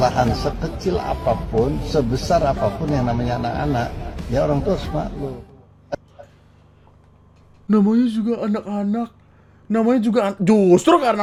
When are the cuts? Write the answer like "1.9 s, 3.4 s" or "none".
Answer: none